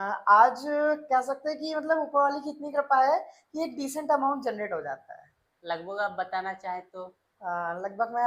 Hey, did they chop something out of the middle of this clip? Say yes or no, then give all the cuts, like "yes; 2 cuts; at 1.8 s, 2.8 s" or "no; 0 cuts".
no; 0 cuts